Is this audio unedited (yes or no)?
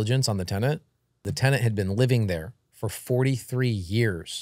no